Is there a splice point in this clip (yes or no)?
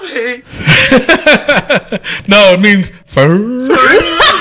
yes